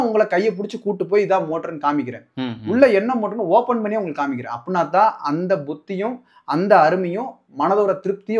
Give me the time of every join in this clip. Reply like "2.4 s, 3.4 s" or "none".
none